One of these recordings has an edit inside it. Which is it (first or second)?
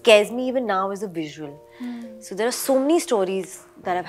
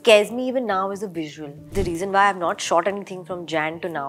second